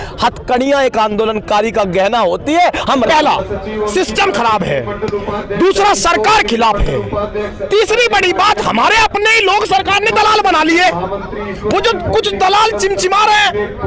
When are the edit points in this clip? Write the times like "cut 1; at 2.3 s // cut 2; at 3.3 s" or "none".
cut 1; at 3.1 s